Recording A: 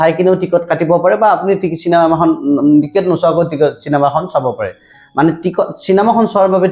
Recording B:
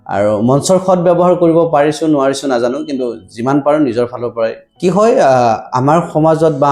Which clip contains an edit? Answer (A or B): B